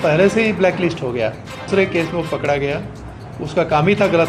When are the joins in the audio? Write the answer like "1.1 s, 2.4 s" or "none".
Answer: 1.6 s